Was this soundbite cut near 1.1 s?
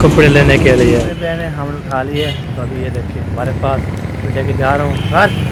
no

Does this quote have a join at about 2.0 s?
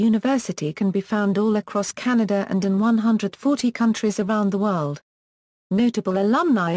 no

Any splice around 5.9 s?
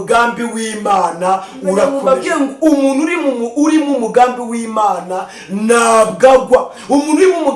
no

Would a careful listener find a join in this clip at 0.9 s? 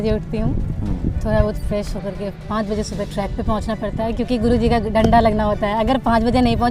no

